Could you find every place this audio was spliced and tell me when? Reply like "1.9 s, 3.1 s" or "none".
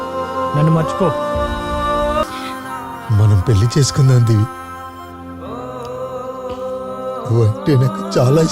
2.2 s